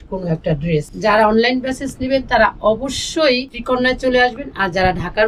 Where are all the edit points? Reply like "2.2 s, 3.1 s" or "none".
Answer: 0.9 s, 3.6 s